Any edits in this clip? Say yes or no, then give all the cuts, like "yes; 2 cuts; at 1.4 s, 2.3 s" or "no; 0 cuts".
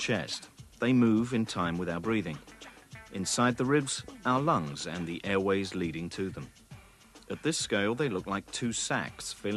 no; 0 cuts